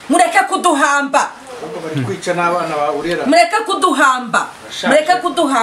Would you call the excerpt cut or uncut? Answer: uncut